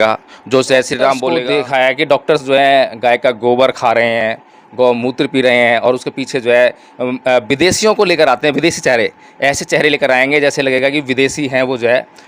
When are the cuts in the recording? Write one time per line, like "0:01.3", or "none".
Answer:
0:01.3